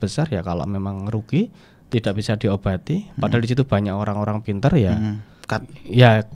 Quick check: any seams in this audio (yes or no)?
no